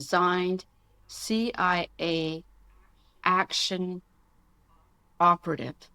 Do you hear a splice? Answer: yes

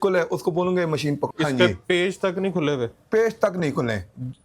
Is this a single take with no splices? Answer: no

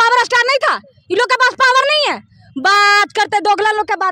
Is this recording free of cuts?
yes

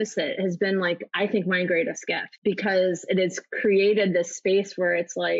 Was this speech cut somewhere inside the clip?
yes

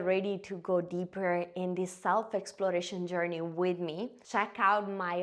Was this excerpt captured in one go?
yes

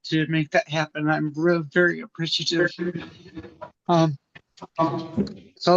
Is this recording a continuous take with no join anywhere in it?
yes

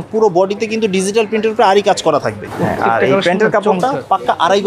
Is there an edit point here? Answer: no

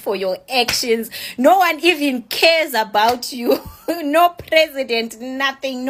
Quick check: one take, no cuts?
yes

